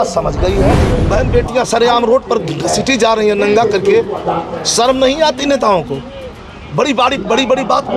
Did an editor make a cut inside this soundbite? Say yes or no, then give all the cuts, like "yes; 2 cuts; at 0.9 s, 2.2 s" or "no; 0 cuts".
yes; 1 cut; at 0.9 s